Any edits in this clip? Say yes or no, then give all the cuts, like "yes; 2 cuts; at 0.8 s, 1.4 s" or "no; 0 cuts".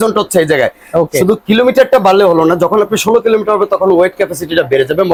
no; 0 cuts